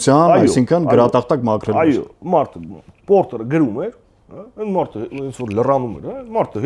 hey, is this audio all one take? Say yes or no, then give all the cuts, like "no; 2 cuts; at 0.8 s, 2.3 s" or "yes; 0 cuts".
yes; 0 cuts